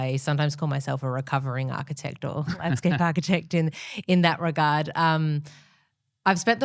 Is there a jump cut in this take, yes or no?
no